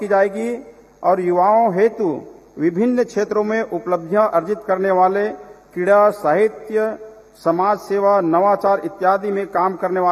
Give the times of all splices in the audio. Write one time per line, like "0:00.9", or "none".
none